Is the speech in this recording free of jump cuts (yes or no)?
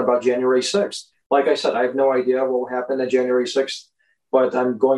yes